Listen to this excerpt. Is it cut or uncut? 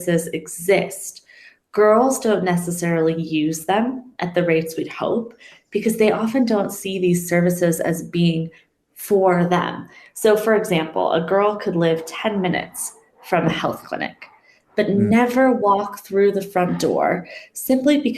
uncut